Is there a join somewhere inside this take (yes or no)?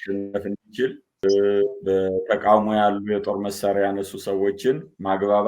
no